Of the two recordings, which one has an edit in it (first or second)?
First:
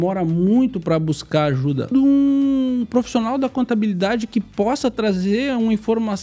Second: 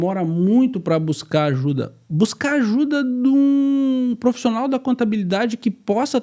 first